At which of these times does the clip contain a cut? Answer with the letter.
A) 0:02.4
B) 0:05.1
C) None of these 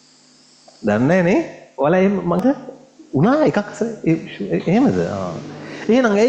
A